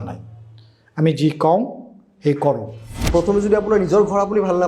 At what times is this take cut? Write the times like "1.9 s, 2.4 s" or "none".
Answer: 2.9 s